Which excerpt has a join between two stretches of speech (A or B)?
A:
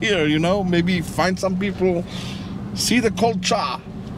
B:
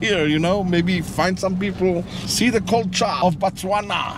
B